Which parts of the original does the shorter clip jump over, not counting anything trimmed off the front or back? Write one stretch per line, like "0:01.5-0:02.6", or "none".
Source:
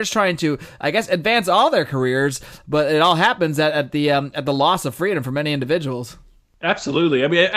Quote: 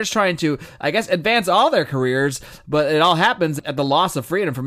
0:03.6-0:04.3

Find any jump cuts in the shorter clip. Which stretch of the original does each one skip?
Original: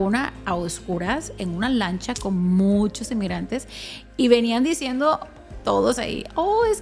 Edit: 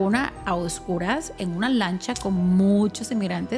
none

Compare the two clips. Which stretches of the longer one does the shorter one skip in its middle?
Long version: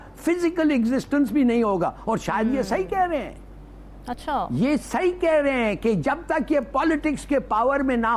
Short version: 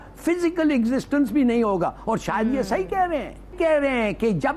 0:03.5-0:05.2

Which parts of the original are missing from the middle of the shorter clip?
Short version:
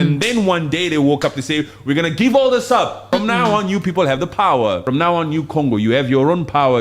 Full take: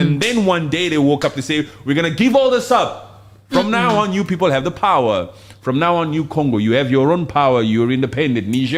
0:03.0-0:03.4
0:05.3-0:05.6

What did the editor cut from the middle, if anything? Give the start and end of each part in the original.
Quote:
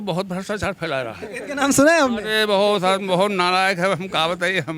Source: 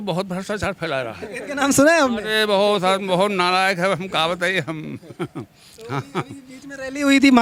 none

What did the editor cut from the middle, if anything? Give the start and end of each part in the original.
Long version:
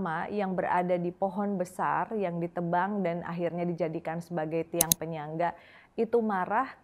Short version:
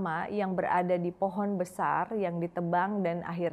none

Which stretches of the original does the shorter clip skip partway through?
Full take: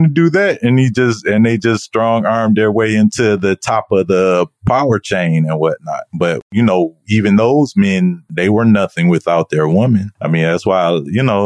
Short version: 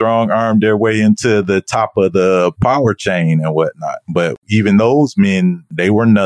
0:04.5-0:04.6
0:06.4-0:07.0

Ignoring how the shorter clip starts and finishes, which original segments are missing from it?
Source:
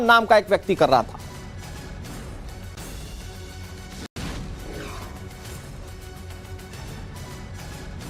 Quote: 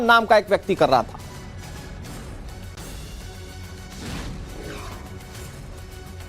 0:04.1-0:04.2

